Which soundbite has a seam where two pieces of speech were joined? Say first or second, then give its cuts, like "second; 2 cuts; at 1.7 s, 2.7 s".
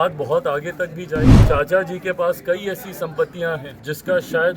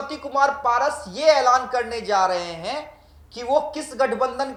first; 2 cuts; at 1.4 s, 3.7 s